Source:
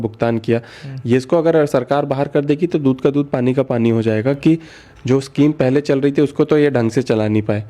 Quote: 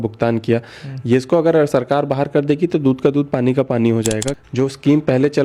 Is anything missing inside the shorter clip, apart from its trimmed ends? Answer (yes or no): yes